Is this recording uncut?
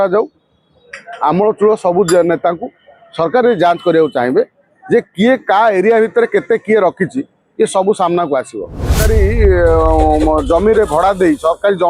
no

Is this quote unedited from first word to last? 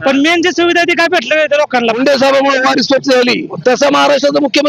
no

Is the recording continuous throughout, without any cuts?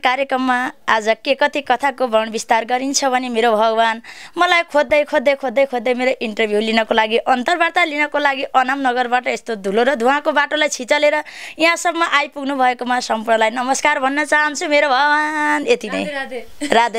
yes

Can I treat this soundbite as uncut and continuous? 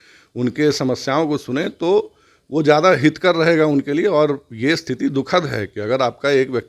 yes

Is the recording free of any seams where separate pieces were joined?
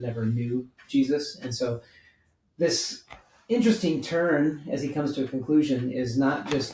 yes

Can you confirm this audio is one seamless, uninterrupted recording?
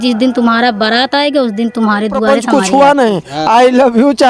no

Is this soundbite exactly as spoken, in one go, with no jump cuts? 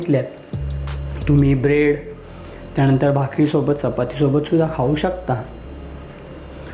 yes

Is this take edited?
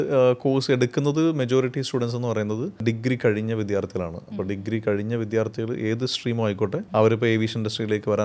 no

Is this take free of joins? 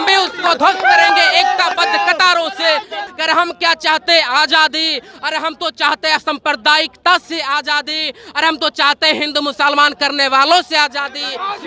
no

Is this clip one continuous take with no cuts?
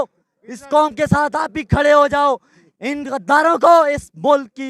yes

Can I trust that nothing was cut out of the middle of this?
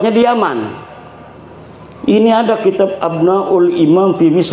yes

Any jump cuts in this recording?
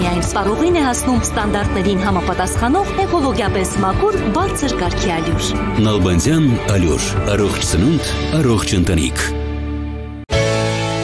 yes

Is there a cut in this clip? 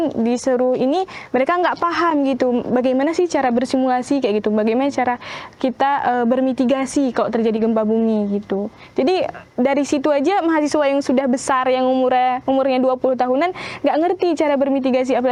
no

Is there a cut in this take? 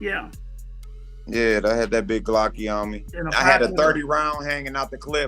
yes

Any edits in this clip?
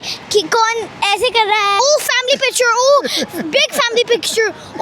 yes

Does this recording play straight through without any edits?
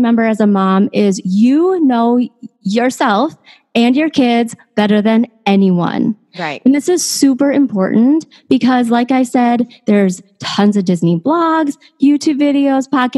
yes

